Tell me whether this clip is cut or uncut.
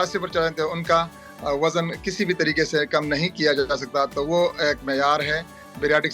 uncut